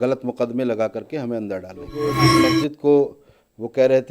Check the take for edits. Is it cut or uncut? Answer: cut